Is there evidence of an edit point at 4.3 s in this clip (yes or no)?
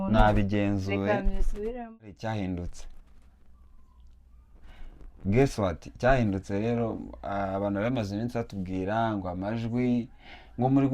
no